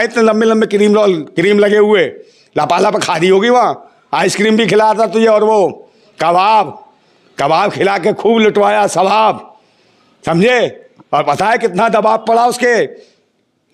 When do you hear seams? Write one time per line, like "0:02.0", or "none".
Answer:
none